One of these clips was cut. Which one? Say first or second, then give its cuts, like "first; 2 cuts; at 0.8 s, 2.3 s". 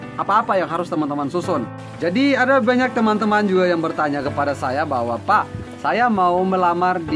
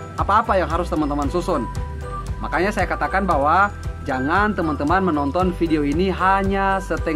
first; 1 cut; at 1.8 s